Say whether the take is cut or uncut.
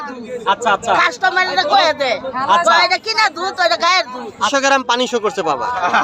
cut